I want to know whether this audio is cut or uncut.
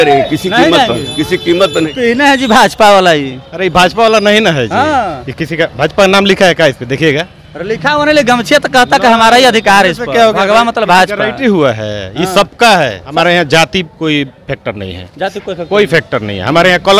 cut